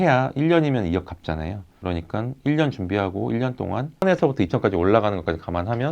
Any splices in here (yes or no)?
yes